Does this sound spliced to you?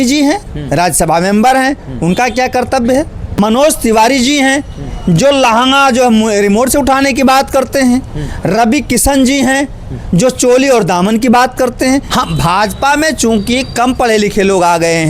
yes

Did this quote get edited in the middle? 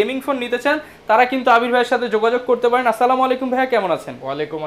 no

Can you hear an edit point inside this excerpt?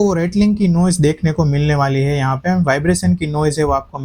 no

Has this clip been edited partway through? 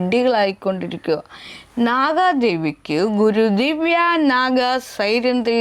no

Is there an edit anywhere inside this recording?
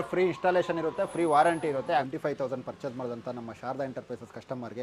yes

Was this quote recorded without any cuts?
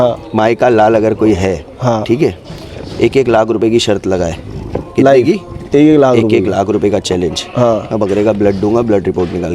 yes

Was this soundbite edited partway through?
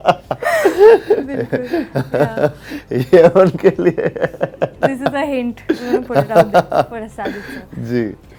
no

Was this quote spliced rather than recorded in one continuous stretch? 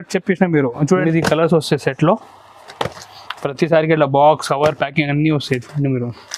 yes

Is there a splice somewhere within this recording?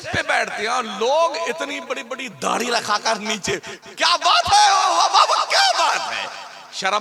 no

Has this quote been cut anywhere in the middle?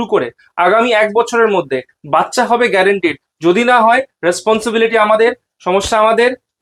no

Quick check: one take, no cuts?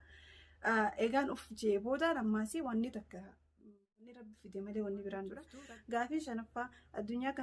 no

